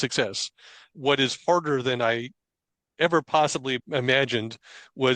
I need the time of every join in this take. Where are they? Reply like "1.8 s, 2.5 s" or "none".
0.9 s, 3.8 s